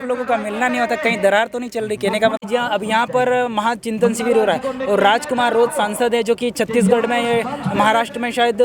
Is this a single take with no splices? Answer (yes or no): no